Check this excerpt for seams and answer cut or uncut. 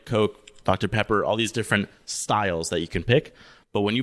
uncut